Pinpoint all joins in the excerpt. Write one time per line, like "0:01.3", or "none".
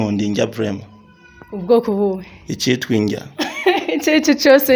none